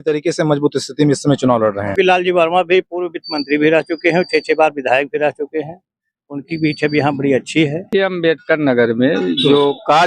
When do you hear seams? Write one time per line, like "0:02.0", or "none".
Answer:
0:01.9
0:07.9